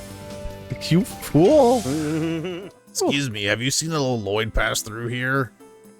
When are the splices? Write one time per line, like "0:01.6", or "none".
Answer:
0:02.4